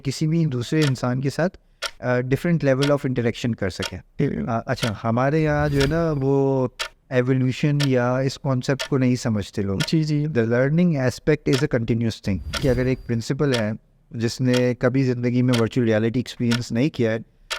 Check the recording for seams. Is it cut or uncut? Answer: cut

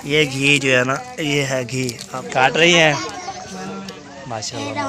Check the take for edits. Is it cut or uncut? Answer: cut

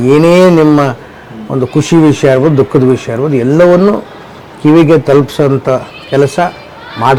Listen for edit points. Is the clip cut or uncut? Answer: uncut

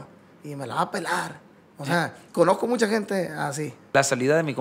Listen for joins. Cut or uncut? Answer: cut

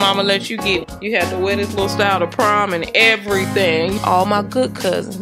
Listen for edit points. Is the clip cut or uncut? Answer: cut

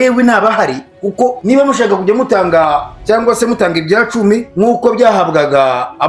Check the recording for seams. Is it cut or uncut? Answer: cut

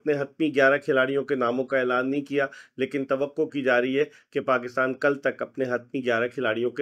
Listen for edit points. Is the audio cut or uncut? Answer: uncut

